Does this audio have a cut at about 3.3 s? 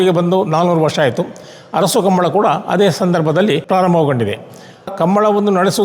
no; 1 cut; at 4.9 s

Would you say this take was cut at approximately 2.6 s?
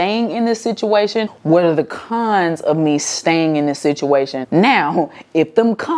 no; 2 cuts; at 1.3 s, 4.4 s

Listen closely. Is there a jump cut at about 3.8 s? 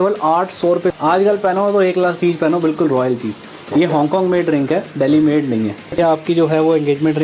no; 2 cuts; at 1.0 s, 6.0 s

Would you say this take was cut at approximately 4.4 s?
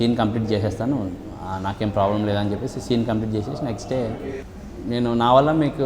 yes; 1 cut; at 4.4 s

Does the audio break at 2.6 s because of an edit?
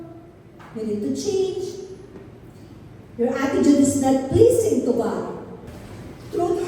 no; 1 cut; at 5.8 s

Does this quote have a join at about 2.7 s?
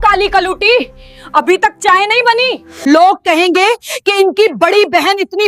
yes; 1 cut; at 2.7 s

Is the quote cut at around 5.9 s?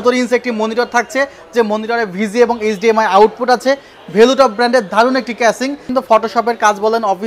yes; 1 cut; at 5.9 s

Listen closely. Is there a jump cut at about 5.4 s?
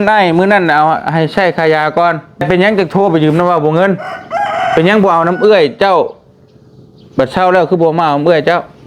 no; 1 cut; at 2.4 s

